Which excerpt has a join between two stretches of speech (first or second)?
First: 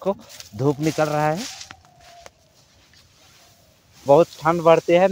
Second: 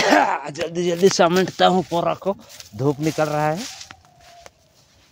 first